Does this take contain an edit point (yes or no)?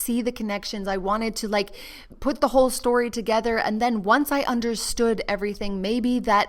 yes